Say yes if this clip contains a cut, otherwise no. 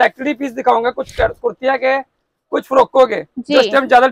no